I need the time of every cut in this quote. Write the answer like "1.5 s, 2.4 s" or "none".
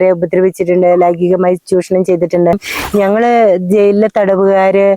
2.7 s